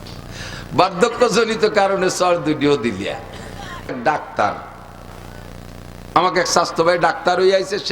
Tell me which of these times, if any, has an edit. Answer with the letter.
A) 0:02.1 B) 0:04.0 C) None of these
B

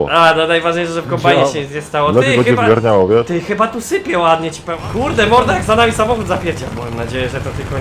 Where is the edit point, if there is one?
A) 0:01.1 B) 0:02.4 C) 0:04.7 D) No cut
C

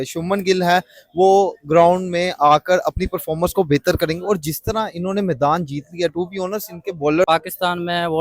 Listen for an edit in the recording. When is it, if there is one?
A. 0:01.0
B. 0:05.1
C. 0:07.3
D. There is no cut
C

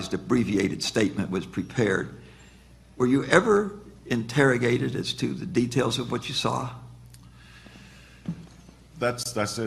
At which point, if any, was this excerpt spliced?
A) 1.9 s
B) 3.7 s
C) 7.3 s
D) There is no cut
A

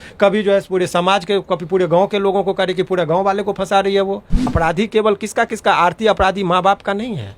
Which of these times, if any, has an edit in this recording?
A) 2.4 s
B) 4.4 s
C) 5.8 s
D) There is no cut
B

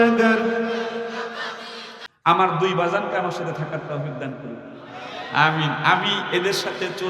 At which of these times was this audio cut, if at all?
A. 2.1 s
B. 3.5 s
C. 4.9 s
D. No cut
A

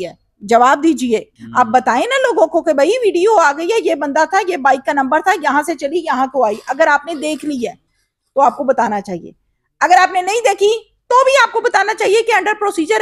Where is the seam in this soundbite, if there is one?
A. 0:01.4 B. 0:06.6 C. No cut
A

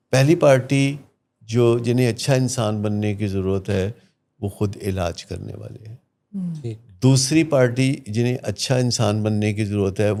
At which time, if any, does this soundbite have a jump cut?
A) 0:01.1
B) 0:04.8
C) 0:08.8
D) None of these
D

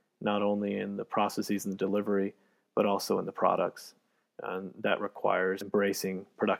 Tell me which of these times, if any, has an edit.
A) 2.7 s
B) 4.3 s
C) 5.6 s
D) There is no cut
C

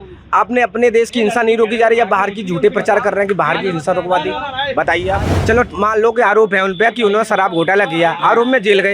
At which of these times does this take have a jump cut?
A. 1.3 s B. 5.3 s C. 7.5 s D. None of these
B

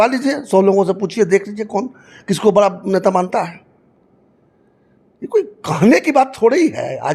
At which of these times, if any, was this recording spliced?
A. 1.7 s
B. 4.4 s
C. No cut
C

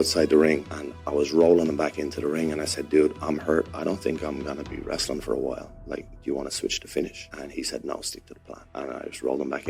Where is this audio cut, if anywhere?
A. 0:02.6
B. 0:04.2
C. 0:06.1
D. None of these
D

